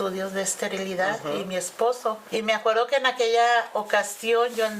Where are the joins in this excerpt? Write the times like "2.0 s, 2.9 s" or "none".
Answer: 2.2 s